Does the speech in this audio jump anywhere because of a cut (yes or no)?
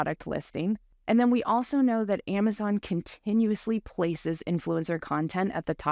yes